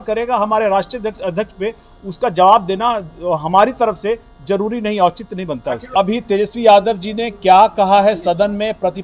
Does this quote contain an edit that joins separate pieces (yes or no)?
yes